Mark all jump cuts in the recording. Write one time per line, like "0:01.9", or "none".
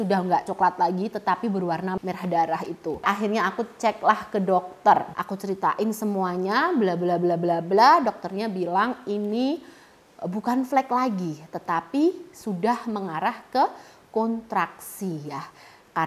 none